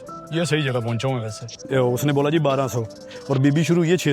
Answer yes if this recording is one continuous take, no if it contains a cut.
no